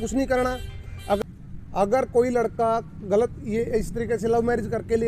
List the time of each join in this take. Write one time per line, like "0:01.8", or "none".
0:01.2